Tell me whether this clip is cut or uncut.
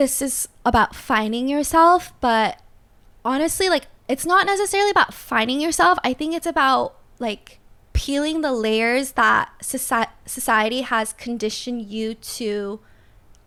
uncut